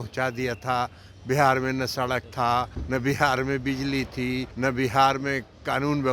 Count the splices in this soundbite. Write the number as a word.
two